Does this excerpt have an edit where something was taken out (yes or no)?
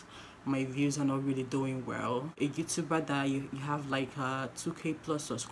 yes